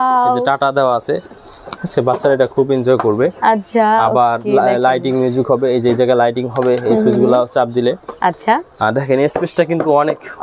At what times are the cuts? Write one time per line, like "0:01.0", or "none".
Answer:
none